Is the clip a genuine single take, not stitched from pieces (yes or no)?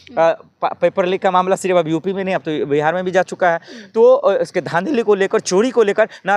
yes